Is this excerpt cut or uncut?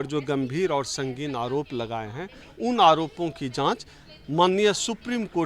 uncut